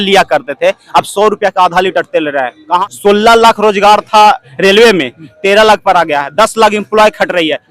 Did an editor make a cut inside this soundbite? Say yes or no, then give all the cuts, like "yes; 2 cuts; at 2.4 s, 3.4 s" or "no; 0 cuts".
yes; 2 cuts; at 2.9 s, 4.5 s